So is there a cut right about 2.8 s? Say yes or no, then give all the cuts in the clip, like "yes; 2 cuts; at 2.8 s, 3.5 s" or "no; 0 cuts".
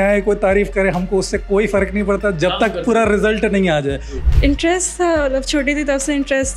no; 1 cut; at 4.1 s